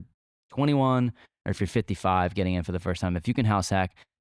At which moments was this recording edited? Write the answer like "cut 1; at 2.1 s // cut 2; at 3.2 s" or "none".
none